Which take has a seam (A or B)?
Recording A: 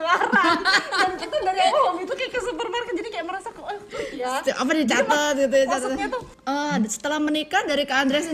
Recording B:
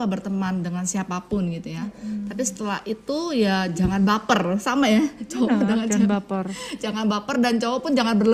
A